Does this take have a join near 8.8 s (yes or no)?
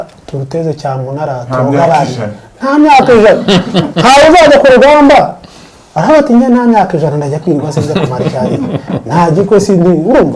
no